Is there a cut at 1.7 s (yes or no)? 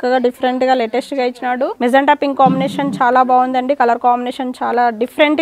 yes